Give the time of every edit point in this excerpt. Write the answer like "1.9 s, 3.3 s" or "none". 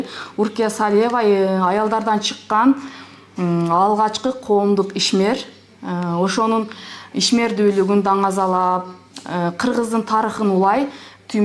none